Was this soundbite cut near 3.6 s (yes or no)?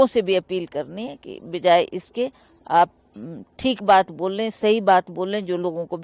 no